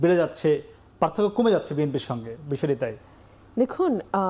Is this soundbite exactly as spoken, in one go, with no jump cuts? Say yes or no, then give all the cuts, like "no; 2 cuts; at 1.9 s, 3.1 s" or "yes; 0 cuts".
yes; 0 cuts